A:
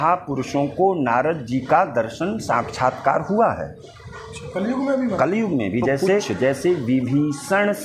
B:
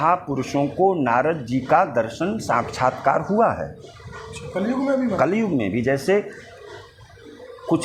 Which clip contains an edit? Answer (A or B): A